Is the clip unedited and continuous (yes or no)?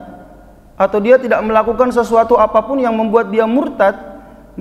yes